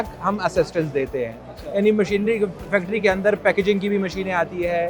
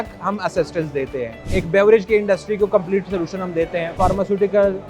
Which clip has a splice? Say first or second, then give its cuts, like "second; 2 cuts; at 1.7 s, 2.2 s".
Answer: second; 2 cuts; at 1.4 s, 3.9 s